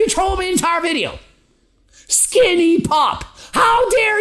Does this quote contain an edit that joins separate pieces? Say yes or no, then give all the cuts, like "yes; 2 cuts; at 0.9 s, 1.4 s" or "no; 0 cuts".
no; 0 cuts